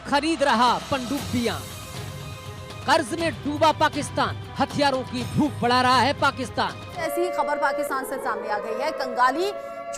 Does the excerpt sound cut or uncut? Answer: cut